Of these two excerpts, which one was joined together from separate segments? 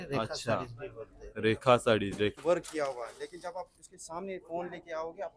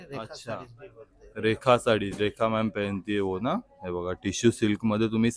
first; 1 cut; at 2.4 s

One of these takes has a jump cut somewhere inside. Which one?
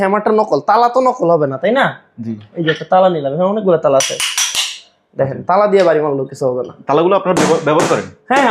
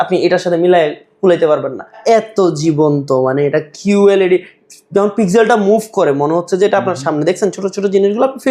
second; 1 cut; at 2.0 s

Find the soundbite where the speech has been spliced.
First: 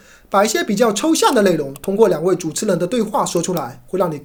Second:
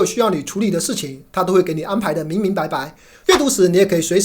second; 1 cut; at 3.1 s

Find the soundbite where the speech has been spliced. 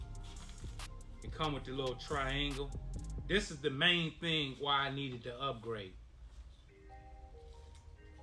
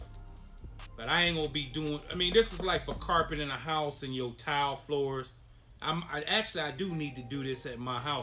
second; 1 cut; at 0.9 s

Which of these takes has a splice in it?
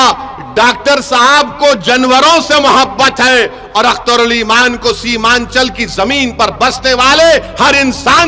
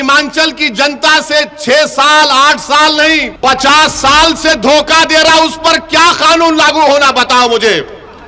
second; 1 cut; at 3.3 s

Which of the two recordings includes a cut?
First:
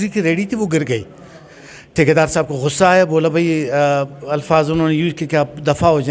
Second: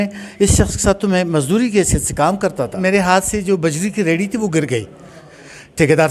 second; 1 cut; at 2.8 s

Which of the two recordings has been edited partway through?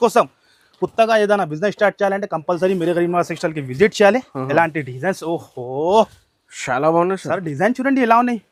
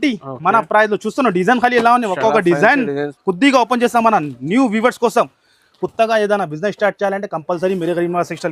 second; 1 cut; at 3.1 s

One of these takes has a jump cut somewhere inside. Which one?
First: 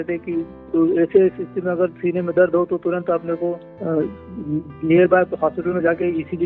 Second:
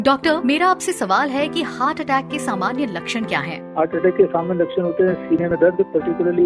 second; 1 cut; at 1.4 s

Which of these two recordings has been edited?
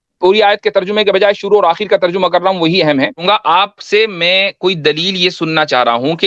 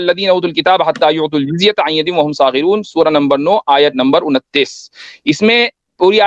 first; 1 cut; at 3.2 s

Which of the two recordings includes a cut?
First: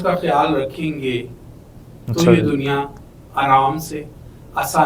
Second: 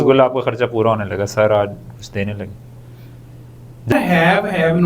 second; 1 cut; at 3.9 s

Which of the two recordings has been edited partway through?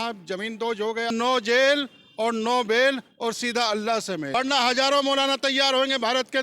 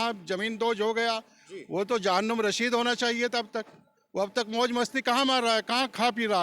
first; 2 cuts; at 1.1 s, 4.3 s

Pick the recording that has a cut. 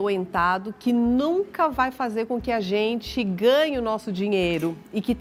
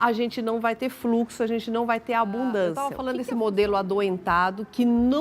second; 1 cut; at 3.0 s

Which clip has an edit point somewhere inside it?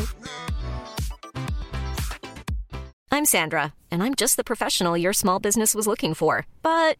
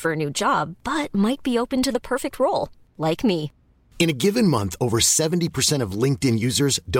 first; 1 cut; at 2.9 s

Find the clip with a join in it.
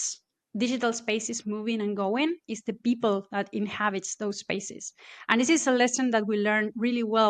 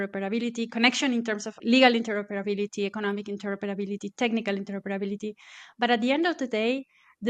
second; 1 cut; at 1.6 s

